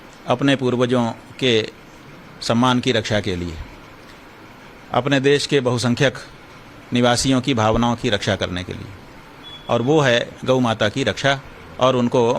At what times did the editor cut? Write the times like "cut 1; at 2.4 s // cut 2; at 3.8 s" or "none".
cut 1; at 5.8 s